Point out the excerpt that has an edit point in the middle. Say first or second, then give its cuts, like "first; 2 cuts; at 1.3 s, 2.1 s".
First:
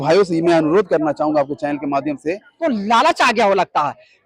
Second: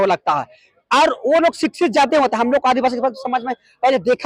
first; 1 cut; at 2.5 s